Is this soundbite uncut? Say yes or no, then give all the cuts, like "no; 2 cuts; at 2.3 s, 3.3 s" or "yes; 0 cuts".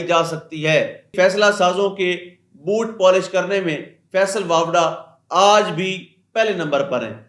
no; 1 cut; at 1.1 s